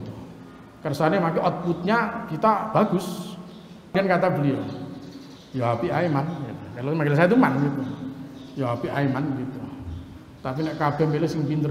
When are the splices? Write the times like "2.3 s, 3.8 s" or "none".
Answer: 3.9 s